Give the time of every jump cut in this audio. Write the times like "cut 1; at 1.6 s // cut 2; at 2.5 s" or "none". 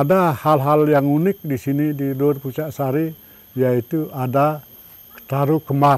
none